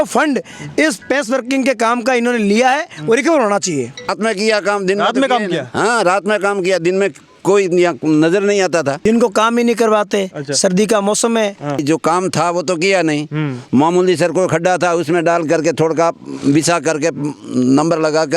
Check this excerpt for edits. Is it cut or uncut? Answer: cut